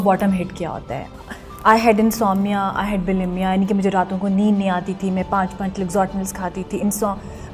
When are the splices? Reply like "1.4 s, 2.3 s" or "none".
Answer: none